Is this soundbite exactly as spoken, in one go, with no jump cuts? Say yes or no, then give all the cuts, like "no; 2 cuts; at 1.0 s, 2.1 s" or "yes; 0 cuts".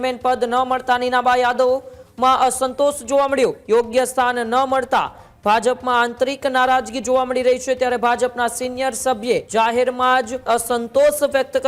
no; 3 cuts; at 3.6 s, 9.5 s, 10.4 s